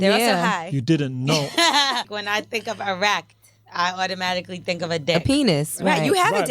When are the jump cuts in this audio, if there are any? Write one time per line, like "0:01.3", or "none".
0:02.1